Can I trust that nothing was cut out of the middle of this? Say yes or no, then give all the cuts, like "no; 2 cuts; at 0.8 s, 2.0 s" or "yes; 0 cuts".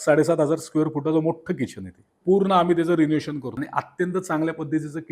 no; 2 cuts; at 2.1 s, 3.5 s